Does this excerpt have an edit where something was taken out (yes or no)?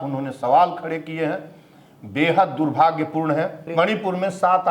yes